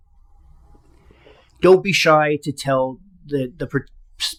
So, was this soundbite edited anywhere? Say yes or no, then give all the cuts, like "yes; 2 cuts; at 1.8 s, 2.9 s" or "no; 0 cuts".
no; 0 cuts